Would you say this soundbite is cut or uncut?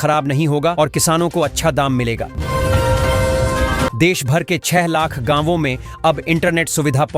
cut